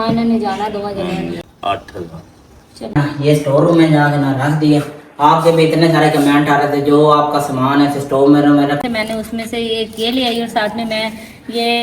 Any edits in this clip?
yes; 3 cuts; at 1.4 s, 3.0 s, 8.8 s

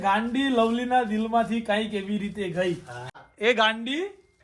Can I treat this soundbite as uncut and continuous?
no; 1 cut; at 3.1 s

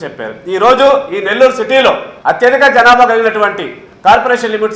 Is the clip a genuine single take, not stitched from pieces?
no; 1 cut; at 2.1 s

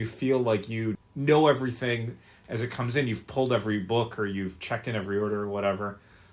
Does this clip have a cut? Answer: yes; 1 cut; at 1.0 s

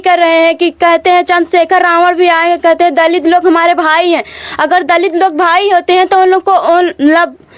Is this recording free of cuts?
yes; 0 cuts

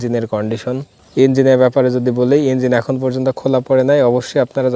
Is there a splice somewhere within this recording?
yes; 1 cut; at 1.0 s

